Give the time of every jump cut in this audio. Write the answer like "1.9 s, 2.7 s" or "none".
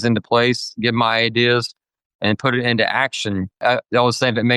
3.6 s